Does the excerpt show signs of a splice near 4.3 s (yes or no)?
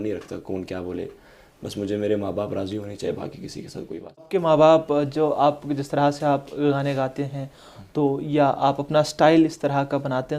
yes